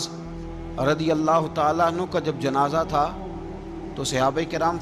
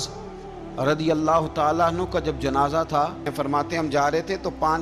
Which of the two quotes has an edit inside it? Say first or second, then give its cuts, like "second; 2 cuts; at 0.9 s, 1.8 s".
second; 1 cut; at 3.3 s